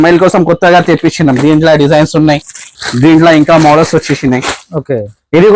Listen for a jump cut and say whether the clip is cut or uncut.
uncut